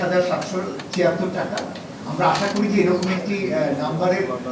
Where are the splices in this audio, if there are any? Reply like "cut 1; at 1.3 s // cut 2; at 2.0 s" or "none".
none

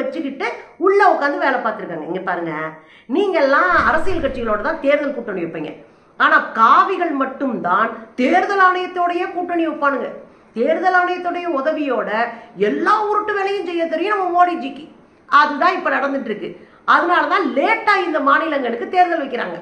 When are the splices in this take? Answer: none

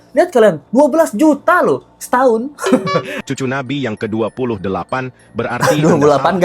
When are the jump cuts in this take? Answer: cut 1; at 3.1 s

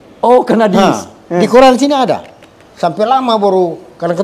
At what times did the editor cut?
none

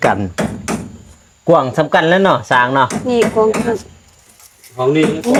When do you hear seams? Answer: none

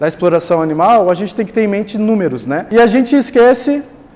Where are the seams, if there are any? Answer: cut 1; at 2.6 s

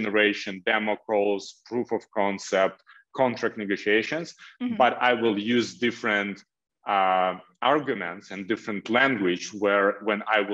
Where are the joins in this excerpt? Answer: none

